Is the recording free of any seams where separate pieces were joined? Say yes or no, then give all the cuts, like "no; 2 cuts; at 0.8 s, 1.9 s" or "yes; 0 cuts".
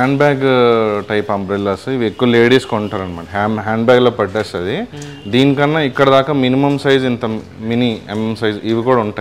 yes; 0 cuts